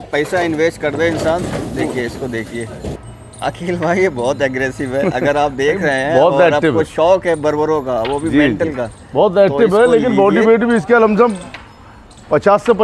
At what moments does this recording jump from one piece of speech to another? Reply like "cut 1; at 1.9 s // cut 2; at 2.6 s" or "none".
none